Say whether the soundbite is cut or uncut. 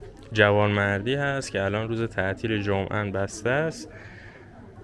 uncut